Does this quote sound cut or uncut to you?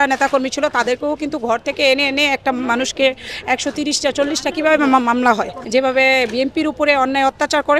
cut